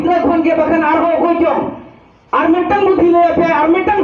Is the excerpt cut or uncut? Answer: uncut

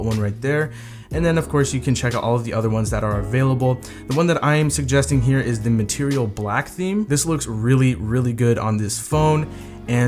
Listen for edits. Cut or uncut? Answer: cut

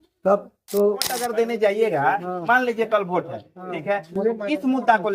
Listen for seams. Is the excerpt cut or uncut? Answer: cut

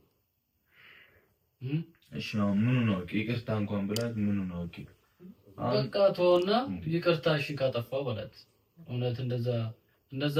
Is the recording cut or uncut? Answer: uncut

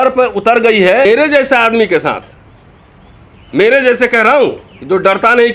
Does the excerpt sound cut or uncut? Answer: cut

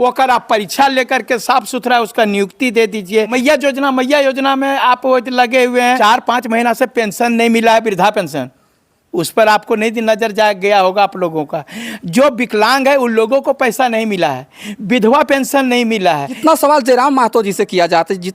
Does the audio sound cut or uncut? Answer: cut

